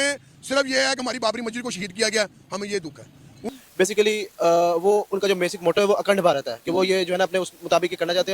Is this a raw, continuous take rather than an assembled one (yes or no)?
no